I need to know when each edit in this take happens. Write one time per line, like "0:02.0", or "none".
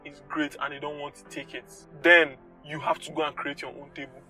0:01.8